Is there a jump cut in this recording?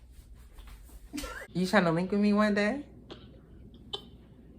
yes; 1 cut; at 1.4 s

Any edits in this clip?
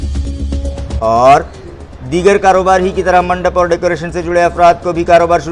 yes; 1 cut; at 1.0 s

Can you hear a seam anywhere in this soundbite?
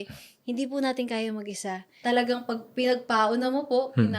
yes; 1 cut; at 2.0 s

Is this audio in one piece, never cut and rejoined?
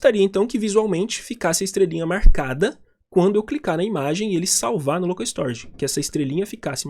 yes; 0 cuts

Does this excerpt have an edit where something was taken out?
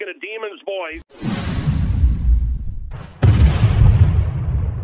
yes; 1 cut; at 1.1 s

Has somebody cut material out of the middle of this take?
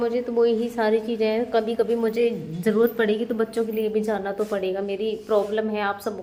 no; 0 cuts

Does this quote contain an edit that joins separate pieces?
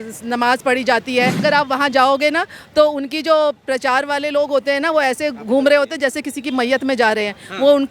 yes; 1 cut; at 1.4 s

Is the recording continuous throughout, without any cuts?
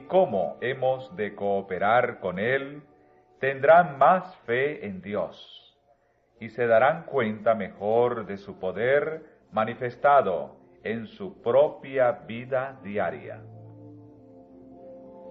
yes; 0 cuts

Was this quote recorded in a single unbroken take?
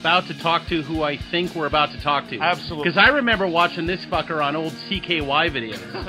no; 1 cut; at 0.9 s

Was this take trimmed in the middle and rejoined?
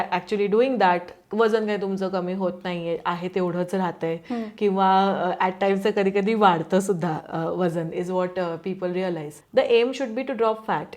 yes; 1 cut; at 9.3 s

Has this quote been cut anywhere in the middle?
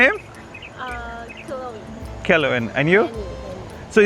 no; 0 cuts

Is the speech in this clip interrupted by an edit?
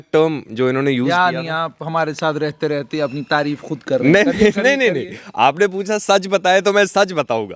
no; 0 cuts

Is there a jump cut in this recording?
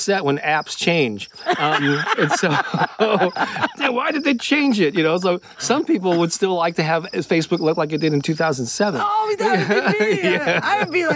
no; 0 cuts

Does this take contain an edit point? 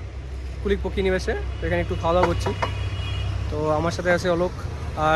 no; 0 cuts

